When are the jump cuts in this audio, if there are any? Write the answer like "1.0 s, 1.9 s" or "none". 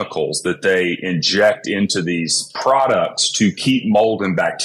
none